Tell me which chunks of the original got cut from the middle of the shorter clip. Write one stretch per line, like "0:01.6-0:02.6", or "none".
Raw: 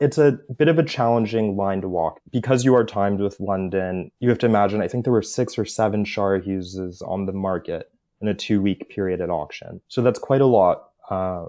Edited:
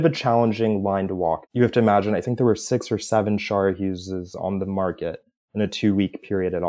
0:02.2-0:04.1